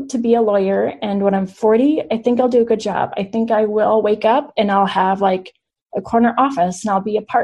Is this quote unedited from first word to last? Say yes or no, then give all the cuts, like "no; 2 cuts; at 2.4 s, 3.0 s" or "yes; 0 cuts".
yes; 0 cuts